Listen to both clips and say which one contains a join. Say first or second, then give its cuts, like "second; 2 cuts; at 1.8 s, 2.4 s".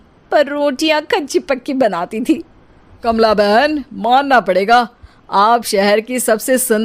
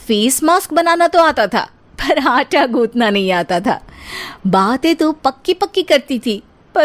first; 1 cut; at 3.1 s